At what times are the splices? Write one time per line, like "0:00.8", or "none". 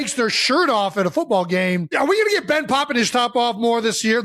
0:01.9